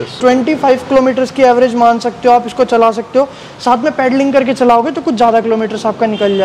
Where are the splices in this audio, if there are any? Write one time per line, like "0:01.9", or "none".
none